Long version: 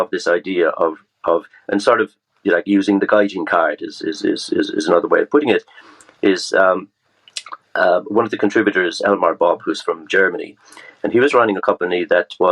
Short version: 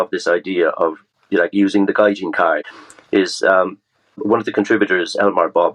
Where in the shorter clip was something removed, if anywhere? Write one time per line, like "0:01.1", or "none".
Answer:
0:01.1
0:02.8
0:04.2